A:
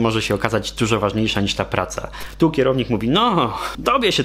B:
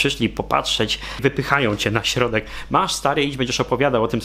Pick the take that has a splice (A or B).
A